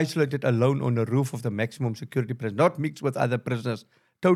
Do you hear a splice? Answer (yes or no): no